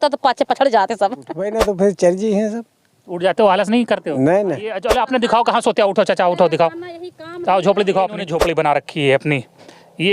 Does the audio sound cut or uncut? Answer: cut